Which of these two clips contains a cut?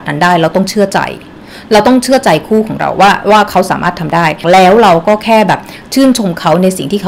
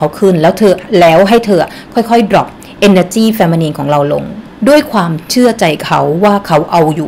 first; 1 cut; at 4.4 s

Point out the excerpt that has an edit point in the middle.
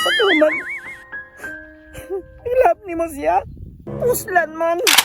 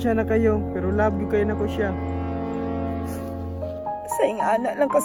first; 1 cut; at 3.8 s

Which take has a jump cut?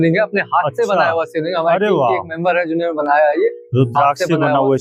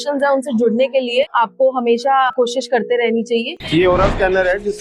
second; 3 cuts; at 1.3 s, 2.3 s, 3.6 s

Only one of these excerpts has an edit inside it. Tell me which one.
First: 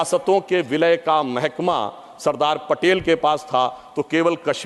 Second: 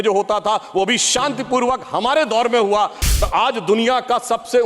second; 1 cut; at 3.1 s

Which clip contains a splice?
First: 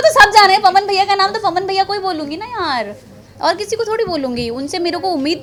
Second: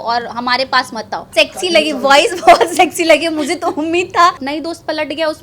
second; 2 cuts; at 1.2 s, 4.4 s

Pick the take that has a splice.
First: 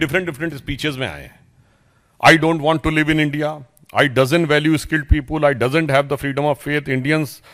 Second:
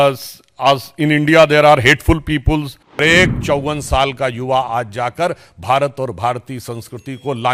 second; 1 cut; at 3.0 s

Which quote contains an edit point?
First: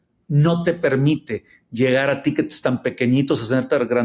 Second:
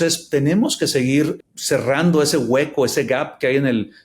second; 1 cut; at 1.3 s

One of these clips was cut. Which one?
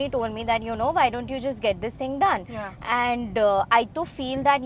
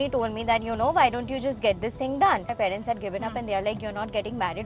second; 1 cut; at 2.5 s

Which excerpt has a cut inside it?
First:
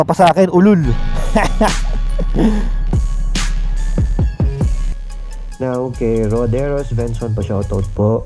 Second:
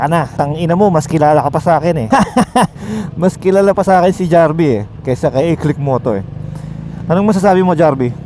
first; 1 cut; at 4.8 s

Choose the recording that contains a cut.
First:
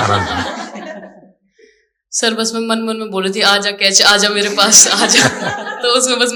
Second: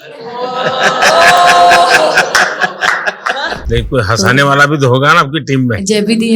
second; 1 cut; at 3.6 s

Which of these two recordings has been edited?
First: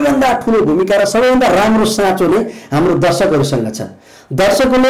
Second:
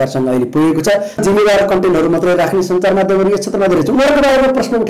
second; 1 cut; at 1.2 s

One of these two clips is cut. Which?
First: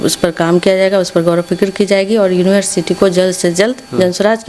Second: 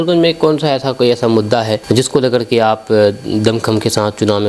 second; 1 cut; at 1.8 s

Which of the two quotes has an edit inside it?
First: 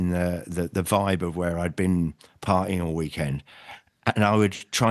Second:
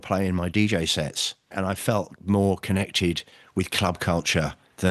second; 1 cut; at 1.5 s

